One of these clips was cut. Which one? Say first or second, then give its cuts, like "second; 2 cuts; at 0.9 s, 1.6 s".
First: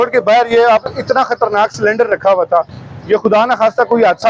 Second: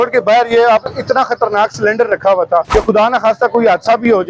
second; 1 cut; at 2.7 s